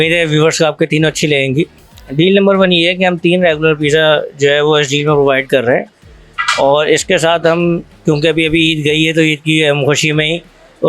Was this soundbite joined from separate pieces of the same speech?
yes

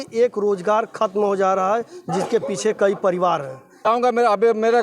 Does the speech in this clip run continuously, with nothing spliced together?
no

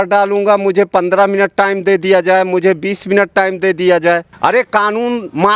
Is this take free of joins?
yes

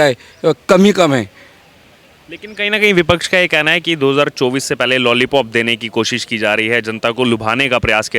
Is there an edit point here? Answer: no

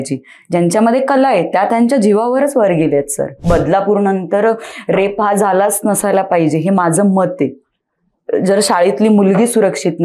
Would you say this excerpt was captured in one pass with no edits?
no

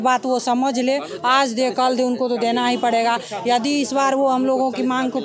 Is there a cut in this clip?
no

